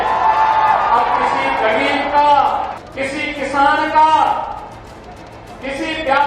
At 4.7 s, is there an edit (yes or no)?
no